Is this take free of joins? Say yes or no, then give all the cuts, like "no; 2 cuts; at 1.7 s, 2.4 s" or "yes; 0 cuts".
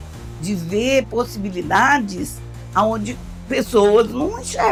yes; 0 cuts